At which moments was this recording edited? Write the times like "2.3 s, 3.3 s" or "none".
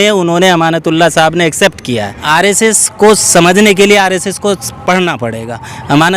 2.2 s